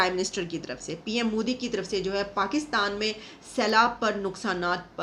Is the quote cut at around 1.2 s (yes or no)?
no